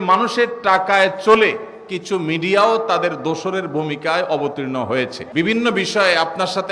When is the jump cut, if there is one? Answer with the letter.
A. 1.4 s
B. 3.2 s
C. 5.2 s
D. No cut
C